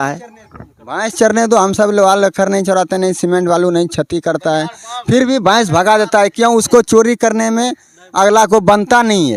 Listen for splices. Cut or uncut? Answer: uncut